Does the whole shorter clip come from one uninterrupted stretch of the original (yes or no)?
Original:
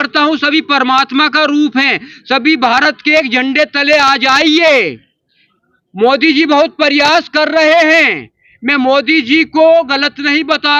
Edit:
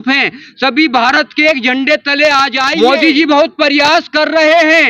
no